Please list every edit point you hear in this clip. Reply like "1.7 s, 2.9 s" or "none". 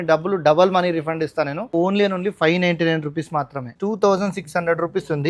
1.7 s, 3.7 s

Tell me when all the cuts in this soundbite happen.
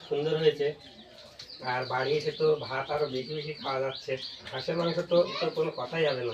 4.5 s, 5.3 s

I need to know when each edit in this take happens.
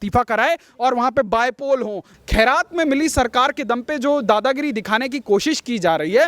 2.1 s

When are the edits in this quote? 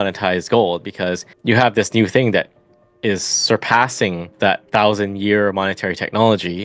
1.3 s, 4.3 s

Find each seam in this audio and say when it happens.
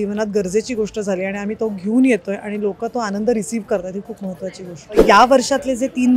5.0 s

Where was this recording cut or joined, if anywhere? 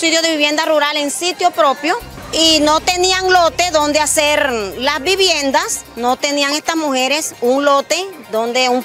2.2 s

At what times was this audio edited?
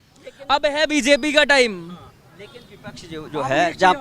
none

